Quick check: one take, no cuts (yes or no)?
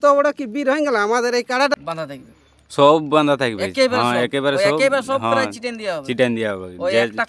no